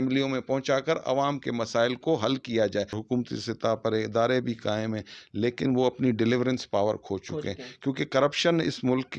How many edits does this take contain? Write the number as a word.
one